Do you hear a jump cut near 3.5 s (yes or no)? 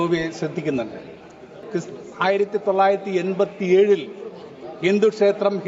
no